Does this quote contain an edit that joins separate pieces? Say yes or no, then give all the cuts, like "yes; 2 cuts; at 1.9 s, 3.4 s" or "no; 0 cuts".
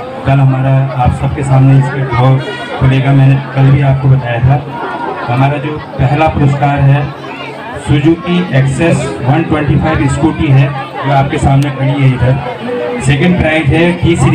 no; 0 cuts